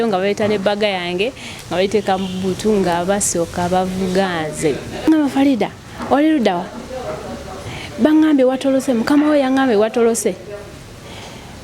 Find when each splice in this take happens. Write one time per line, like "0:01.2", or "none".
0:05.1